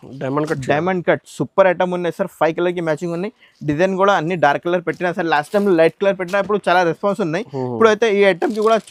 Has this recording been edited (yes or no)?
no